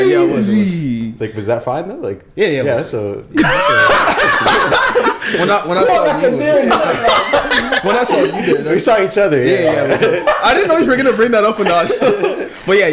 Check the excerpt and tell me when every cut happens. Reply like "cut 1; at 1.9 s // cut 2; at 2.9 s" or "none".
none